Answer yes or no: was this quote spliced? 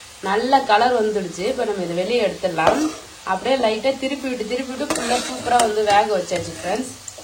no